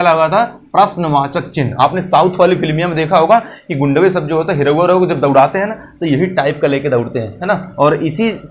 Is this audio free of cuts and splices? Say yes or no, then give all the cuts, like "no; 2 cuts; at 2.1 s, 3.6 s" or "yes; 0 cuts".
yes; 0 cuts